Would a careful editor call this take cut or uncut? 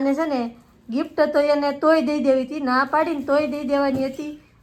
uncut